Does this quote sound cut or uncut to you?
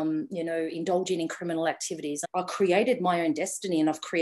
cut